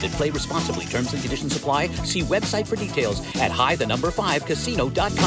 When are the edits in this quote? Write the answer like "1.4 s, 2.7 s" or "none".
none